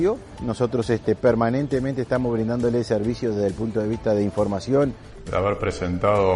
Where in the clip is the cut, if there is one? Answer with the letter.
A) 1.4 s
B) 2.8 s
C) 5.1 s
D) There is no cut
C